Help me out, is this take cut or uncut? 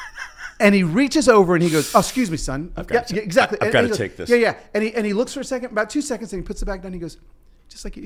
uncut